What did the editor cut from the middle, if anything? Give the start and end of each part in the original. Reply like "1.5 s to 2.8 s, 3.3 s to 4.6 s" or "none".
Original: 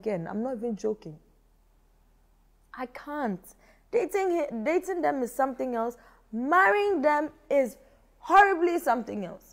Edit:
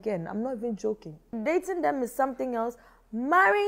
1.3 s to 4.5 s